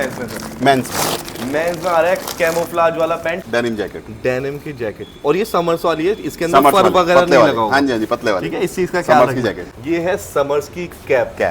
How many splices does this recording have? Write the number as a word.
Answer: two